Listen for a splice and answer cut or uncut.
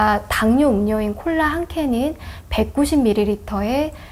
uncut